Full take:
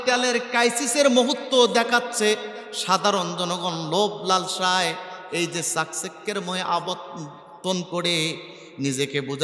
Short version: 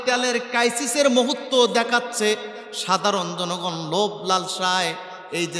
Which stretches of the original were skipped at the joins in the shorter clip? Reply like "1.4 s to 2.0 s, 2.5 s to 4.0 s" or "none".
none